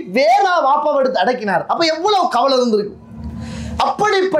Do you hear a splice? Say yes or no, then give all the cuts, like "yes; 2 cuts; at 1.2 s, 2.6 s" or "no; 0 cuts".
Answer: no; 0 cuts